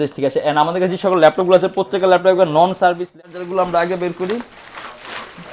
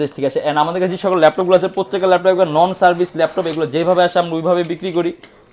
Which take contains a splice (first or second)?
first